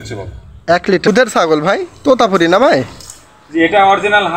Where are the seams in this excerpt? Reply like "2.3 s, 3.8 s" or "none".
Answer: 1.1 s